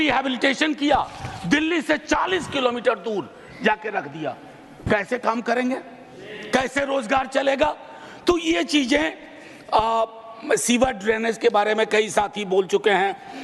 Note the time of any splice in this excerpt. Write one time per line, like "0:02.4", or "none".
none